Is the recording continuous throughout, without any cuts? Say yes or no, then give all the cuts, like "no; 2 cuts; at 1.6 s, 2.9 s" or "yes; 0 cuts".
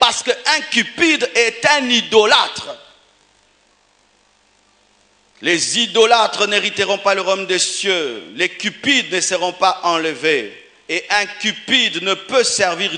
yes; 0 cuts